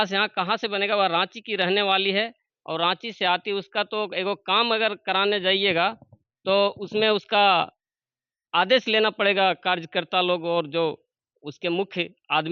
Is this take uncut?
yes; 0 cuts

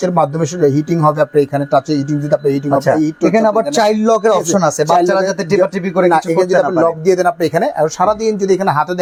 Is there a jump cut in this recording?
no; 0 cuts

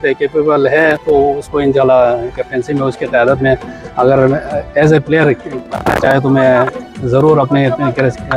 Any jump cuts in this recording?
no; 0 cuts

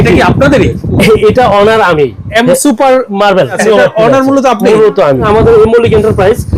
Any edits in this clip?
yes; 3 cuts; at 2.2 s, 3.6 s, 5.2 s

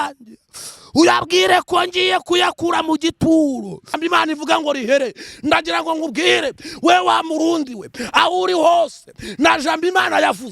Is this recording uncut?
no; 1 cut; at 4.0 s

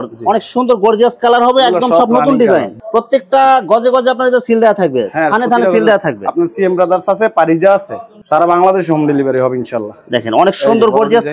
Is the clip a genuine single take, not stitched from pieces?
no; 2 cuts; at 2.8 s, 8.2 s

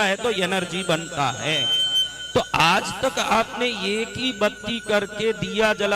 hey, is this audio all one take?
yes; 0 cuts

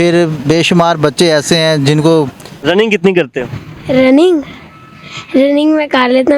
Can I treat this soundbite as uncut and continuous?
no; 1 cut; at 2.6 s

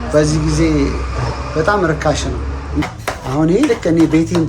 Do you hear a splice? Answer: yes; 1 cut; at 2.9 s

